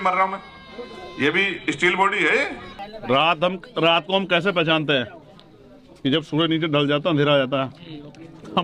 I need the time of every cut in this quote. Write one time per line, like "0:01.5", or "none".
0:02.9